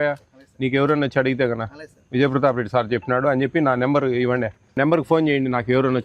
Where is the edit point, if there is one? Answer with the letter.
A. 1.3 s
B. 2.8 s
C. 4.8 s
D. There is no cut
C